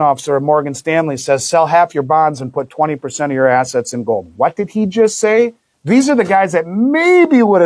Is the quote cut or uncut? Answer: cut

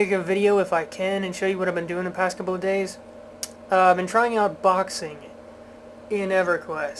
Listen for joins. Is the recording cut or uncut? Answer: cut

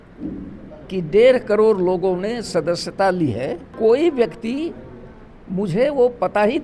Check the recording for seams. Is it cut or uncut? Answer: cut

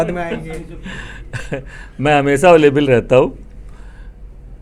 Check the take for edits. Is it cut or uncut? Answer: uncut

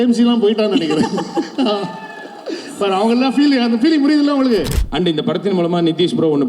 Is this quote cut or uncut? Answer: cut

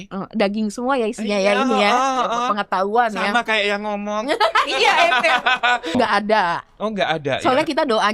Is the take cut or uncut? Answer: cut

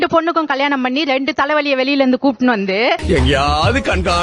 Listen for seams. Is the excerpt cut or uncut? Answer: cut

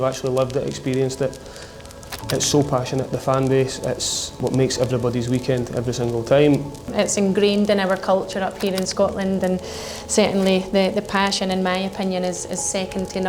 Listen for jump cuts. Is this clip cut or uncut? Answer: cut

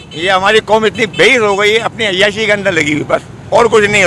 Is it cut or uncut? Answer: uncut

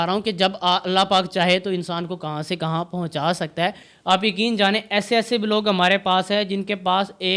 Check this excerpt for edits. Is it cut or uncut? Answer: cut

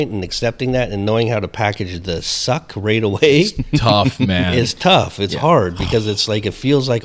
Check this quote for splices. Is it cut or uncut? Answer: uncut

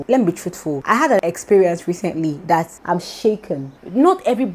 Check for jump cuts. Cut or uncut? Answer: cut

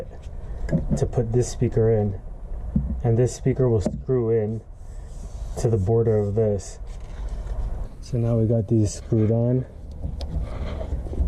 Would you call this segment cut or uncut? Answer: cut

